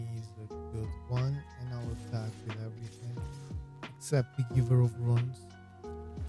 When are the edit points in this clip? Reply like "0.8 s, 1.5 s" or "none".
5.4 s